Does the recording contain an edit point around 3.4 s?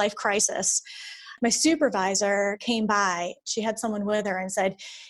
yes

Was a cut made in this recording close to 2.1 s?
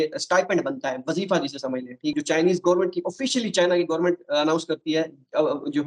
yes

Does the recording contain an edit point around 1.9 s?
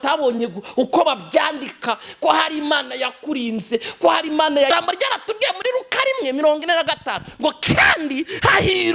no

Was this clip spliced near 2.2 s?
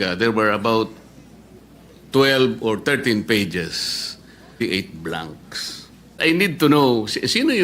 no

